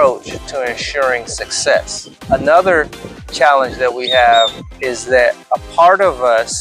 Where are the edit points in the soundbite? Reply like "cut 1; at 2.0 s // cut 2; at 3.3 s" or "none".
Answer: cut 1; at 2.2 s // cut 2; at 4.7 s